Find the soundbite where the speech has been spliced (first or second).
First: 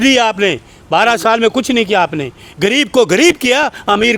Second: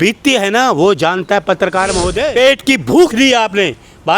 second